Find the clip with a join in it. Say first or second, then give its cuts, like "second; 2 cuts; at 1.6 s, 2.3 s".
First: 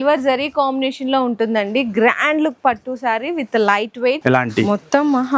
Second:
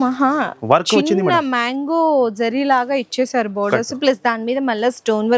first; 1 cut; at 4.2 s